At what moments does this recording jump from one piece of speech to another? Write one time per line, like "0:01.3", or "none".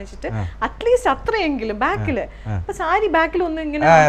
none